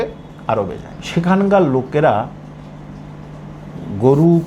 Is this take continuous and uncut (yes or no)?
no